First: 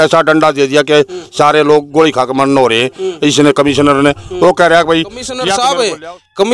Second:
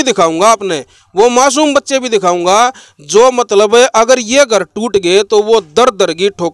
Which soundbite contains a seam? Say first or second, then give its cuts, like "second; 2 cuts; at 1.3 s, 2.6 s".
first; 1 cut; at 5.4 s